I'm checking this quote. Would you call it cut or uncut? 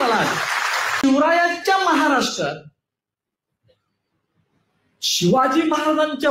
cut